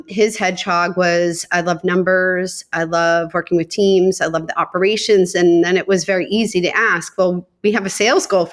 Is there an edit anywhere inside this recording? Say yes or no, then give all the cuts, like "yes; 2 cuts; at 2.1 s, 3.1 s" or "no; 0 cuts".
no; 0 cuts